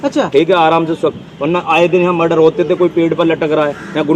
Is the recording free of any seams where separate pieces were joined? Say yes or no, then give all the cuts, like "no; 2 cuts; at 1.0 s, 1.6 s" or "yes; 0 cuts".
yes; 0 cuts